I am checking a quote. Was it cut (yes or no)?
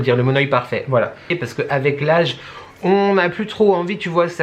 yes